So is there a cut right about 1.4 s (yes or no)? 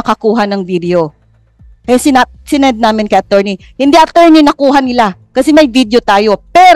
no